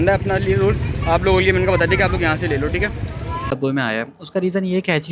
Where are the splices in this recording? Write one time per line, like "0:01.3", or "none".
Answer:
0:03.5